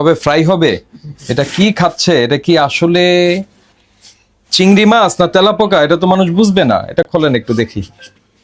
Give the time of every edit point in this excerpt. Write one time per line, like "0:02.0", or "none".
none